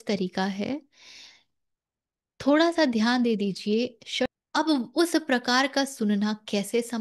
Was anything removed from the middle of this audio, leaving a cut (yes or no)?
yes